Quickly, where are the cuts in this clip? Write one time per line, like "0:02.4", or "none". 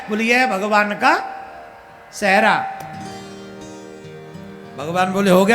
none

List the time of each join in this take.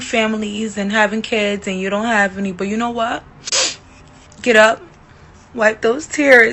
none

